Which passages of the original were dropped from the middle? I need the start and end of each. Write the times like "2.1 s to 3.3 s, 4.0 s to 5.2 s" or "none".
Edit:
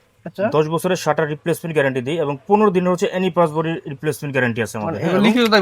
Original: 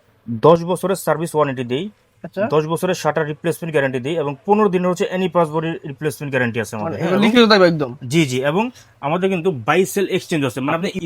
none